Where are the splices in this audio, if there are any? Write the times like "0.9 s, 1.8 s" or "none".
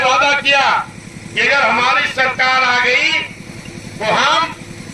none